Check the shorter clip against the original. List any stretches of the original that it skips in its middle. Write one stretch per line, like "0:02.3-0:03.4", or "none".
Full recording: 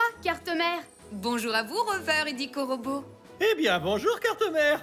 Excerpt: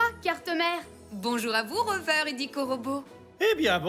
none